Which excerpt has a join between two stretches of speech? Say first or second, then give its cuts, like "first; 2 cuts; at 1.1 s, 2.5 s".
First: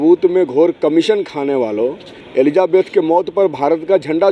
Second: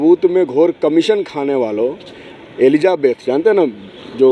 first; 1 cut; at 2.1 s